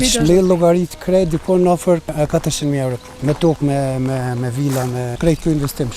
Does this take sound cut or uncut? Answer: cut